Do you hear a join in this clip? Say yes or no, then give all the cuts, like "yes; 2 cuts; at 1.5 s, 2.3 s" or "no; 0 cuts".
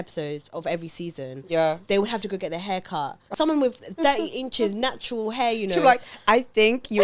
yes; 1 cut; at 3.3 s